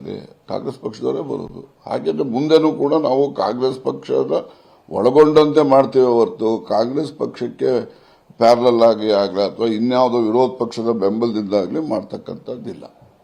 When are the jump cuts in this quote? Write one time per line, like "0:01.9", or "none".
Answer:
none